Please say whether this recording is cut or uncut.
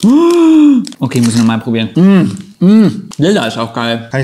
cut